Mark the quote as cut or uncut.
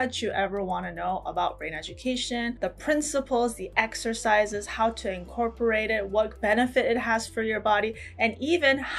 uncut